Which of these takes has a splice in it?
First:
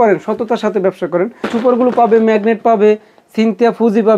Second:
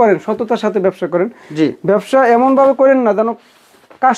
first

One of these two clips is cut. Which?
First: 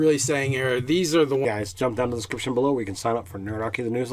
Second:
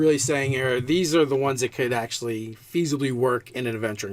second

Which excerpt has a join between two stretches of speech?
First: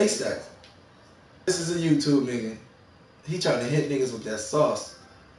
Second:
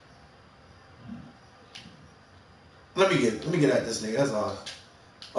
first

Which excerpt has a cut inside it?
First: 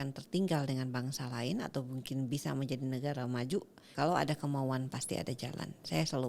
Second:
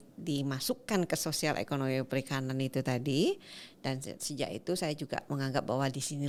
first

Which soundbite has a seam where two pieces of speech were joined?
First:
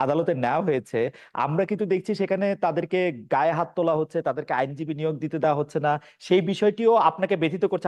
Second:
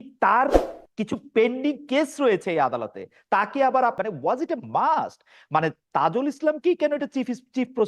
second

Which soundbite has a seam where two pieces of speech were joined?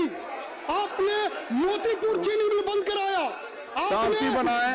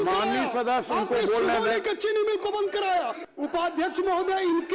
second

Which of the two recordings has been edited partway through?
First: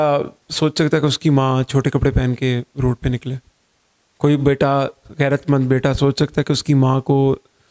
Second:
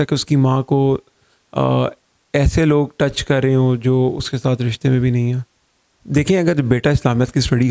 second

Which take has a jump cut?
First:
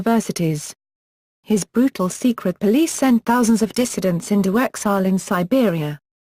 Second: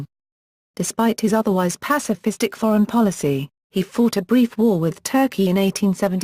first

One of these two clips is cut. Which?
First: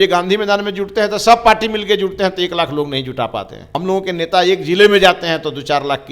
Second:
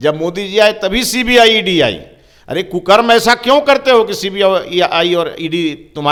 first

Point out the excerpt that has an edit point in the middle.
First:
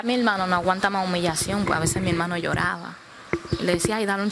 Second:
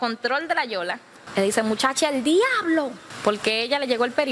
second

